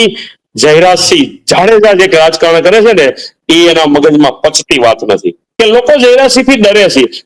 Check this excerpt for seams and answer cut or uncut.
cut